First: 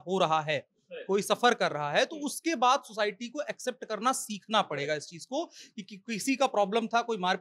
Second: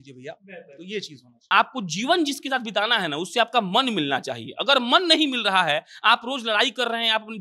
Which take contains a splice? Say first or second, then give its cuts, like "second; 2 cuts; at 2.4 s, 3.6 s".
second; 1 cut; at 1.4 s